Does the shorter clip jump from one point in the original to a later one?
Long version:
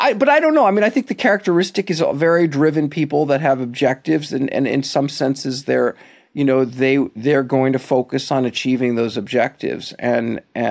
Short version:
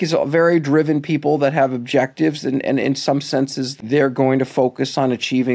yes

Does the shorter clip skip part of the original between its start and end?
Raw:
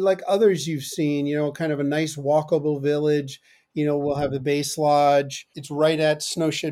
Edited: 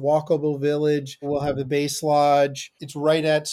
yes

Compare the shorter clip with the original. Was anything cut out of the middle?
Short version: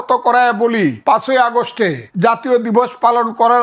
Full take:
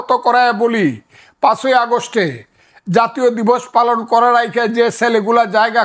yes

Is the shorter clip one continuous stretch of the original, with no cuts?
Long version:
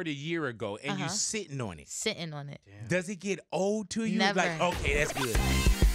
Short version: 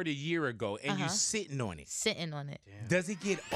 yes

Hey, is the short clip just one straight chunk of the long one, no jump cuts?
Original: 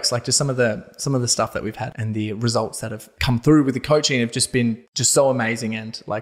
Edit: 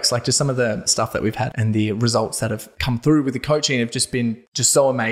no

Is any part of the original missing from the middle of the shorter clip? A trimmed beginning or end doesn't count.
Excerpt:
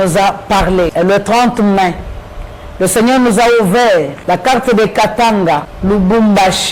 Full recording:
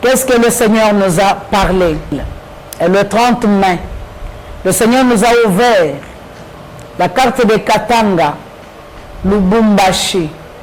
yes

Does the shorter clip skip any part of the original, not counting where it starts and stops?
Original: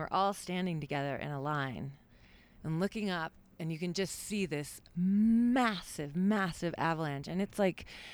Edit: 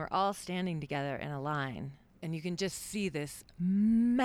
yes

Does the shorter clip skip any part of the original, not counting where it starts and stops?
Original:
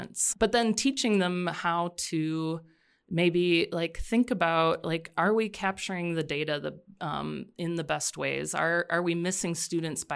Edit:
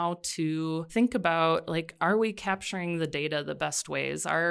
yes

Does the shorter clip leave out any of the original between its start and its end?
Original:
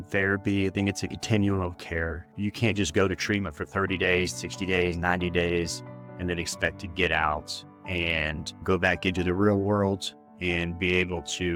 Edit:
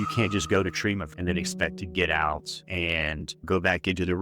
yes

